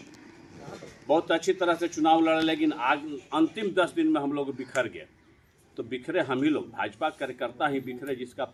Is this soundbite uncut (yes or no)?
yes